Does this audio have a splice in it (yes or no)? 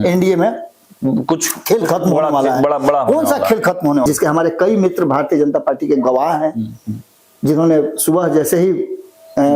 yes